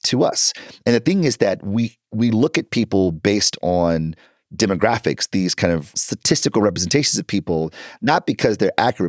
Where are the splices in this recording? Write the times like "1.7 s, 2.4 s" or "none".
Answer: 5.9 s